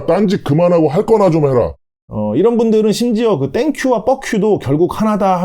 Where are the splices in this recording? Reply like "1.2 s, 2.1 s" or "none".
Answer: 1.8 s